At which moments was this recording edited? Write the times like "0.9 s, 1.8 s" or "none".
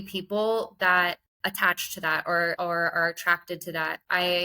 1.3 s, 2.6 s